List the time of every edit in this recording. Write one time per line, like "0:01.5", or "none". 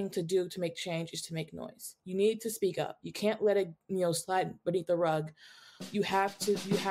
none